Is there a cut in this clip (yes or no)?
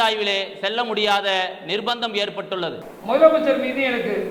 yes